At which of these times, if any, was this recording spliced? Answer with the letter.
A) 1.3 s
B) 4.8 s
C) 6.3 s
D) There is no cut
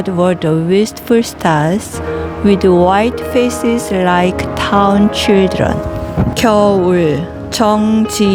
C